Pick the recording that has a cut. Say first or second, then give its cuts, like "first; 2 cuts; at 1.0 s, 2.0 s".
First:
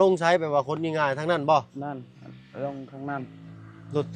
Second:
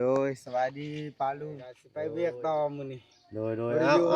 second; 1 cut; at 1.8 s